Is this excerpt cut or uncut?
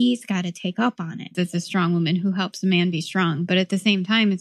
cut